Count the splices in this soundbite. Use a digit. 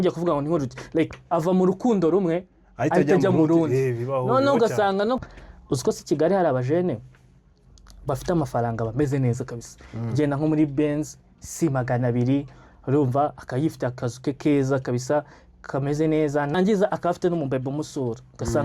2